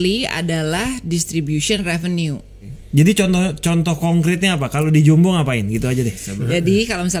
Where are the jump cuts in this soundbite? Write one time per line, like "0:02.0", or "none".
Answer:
0:02.8
0:06.3